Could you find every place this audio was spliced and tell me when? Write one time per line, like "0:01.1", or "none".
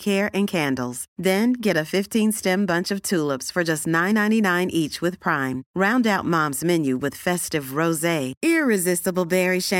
none